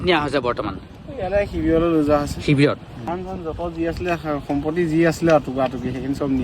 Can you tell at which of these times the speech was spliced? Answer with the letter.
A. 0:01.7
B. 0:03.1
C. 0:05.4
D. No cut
B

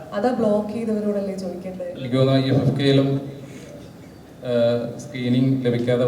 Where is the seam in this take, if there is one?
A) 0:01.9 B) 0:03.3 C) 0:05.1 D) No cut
A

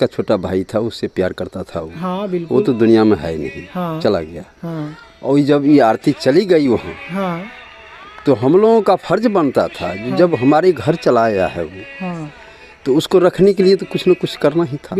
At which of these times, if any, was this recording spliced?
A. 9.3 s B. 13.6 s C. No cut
C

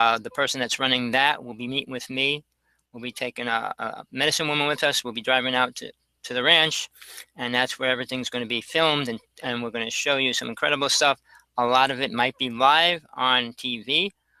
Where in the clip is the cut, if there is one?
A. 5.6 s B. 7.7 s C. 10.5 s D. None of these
B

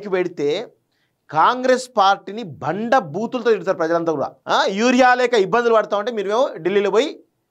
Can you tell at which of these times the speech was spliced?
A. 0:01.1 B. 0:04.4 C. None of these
B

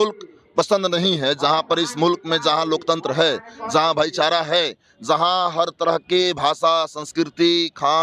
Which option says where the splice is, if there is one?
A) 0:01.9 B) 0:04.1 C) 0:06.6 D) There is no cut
D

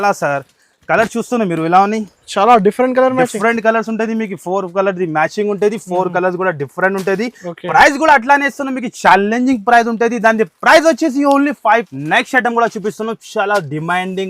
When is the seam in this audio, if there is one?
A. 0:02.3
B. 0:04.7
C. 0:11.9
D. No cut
C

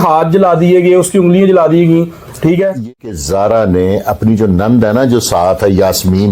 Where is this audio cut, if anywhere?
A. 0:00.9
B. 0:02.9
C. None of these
B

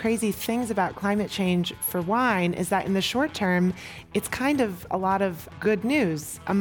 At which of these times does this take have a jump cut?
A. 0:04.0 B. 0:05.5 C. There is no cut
B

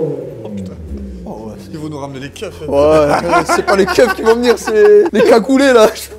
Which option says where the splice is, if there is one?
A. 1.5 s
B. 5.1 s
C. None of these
B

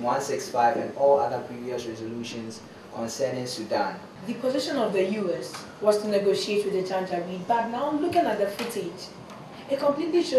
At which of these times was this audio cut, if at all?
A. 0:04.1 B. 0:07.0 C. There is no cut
A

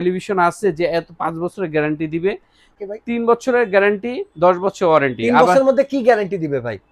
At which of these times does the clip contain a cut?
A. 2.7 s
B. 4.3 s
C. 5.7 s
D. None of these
A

